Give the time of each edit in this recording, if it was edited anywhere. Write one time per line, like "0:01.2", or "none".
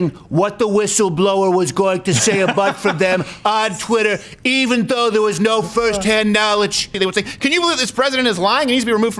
0:06.9